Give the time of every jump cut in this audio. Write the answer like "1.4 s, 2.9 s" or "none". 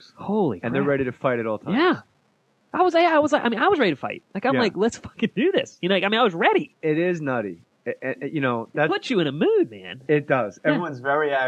none